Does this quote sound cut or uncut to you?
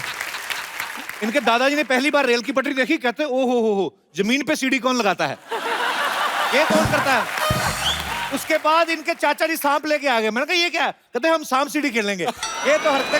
cut